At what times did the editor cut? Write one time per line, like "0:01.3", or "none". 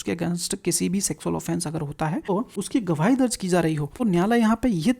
0:02.4
0:03.9

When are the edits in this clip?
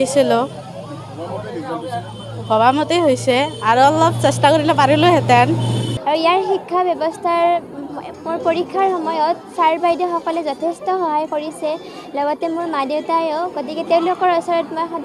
0:05.9

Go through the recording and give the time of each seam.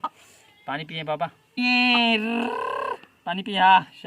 0:01.6

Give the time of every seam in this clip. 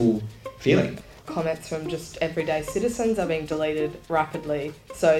0:01.1
0:04.0

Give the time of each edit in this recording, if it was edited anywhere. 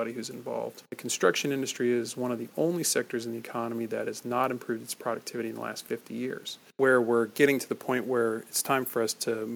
0:00.9
0:06.6

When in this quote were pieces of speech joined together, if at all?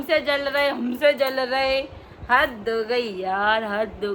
none

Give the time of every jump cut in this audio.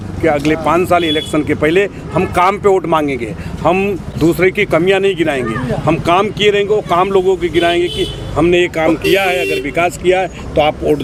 none

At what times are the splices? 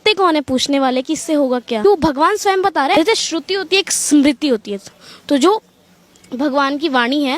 0:01.8
0:02.9

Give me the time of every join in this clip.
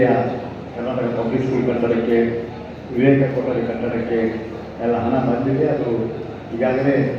none

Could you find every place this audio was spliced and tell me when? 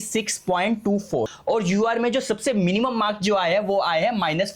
0:01.4

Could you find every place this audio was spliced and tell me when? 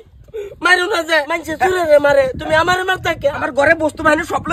0:01.4
0:03.4

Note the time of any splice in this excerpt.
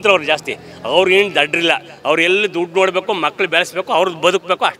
none

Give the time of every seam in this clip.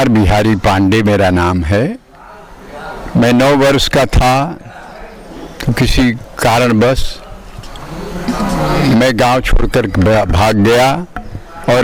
none

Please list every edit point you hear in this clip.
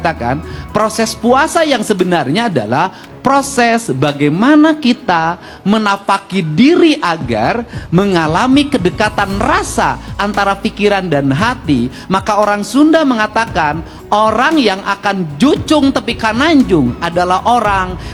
none

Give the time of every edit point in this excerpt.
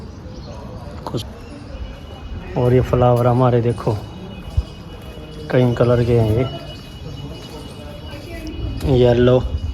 0:01.2

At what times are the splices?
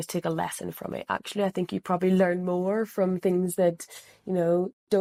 none

